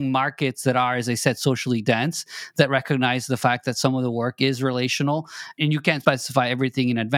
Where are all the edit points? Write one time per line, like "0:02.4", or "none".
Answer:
0:05.6